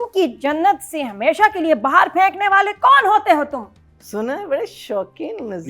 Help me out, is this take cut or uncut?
cut